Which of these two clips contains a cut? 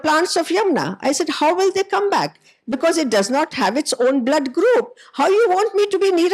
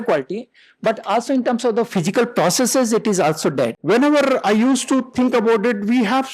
second; 1 cut; at 3.8 s

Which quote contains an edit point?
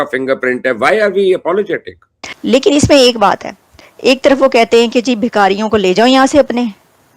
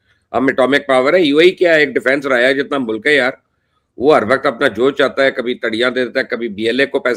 first; 2 cuts; at 2.3 s, 3.8 s

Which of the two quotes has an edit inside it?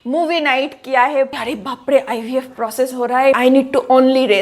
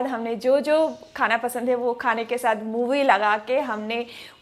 first; 2 cuts; at 1.3 s, 3.4 s

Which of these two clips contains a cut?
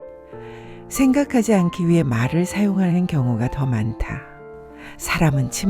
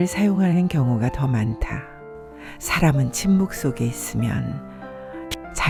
first; 1 cut; at 0.9 s

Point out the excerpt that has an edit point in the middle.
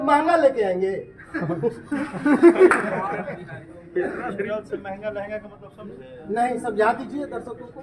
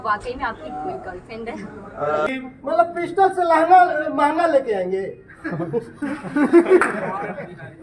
second; 1 cut; at 2.3 s

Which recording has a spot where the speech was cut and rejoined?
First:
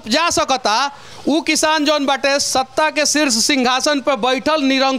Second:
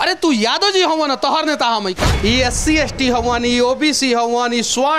second; 1 cut; at 2.0 s

